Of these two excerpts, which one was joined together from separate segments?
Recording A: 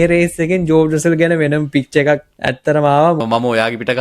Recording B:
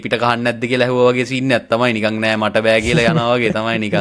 A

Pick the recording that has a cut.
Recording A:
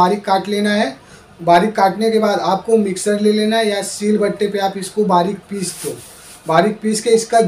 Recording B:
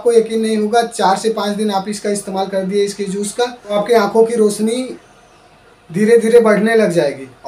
B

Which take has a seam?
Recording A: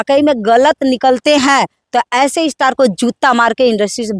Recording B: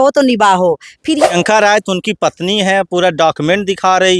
B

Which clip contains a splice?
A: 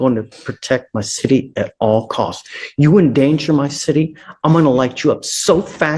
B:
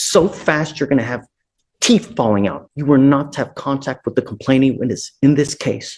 B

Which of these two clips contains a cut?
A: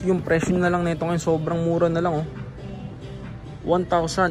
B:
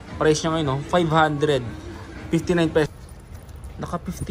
B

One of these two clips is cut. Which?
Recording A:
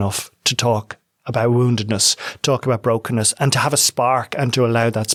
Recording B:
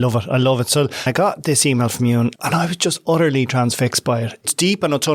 B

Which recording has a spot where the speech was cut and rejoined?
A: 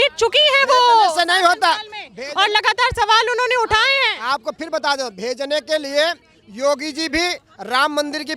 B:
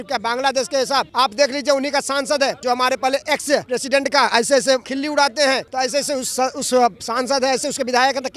B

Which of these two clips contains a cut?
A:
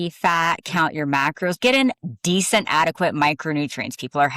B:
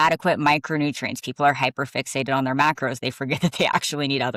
A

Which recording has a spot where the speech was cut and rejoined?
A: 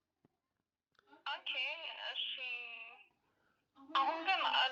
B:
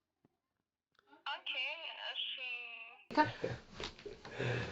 B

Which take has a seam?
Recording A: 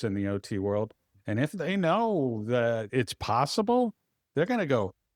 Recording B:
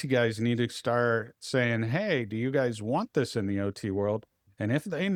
A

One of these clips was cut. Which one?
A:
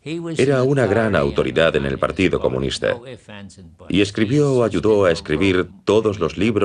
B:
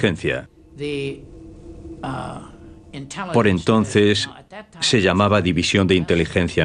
A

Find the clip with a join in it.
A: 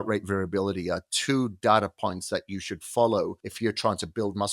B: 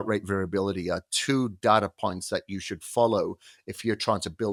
A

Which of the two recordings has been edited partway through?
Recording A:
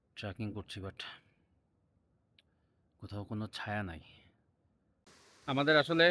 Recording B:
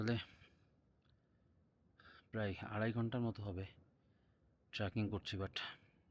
A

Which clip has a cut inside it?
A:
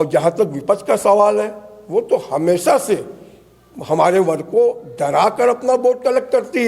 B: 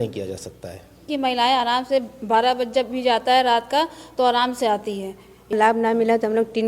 B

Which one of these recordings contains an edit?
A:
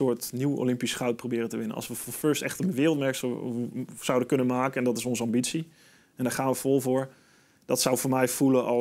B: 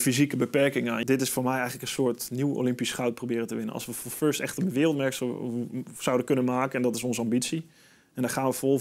B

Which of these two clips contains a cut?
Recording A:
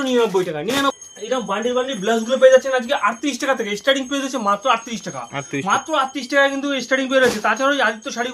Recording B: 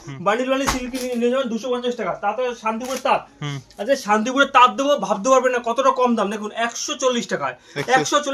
A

